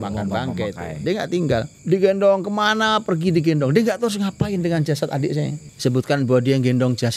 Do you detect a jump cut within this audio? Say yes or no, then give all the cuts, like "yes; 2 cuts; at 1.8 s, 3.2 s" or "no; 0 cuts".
yes; 2 cuts; at 1.7 s, 5.6 s